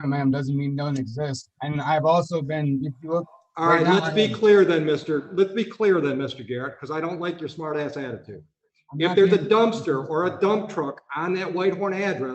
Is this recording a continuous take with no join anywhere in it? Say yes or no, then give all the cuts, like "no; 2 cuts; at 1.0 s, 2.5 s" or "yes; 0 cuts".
yes; 0 cuts